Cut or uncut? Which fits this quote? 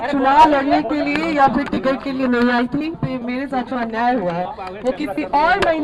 cut